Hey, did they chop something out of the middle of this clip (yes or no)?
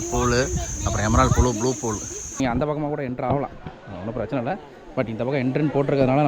yes